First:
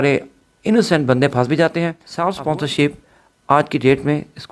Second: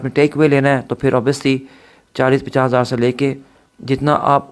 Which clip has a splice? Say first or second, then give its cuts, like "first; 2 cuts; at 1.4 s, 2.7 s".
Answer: first; 1 cut; at 2.0 s